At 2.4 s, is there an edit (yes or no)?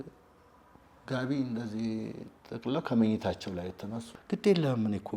no